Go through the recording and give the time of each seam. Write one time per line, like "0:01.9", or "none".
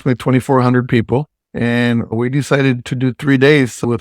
0:01.4